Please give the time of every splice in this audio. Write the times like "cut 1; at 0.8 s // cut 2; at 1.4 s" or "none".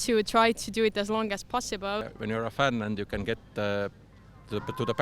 cut 1; at 2.1 s